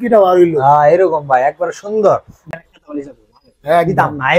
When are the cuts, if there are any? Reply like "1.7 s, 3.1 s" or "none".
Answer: 2.5 s